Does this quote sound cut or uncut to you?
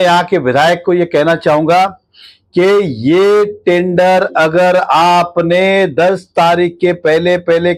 uncut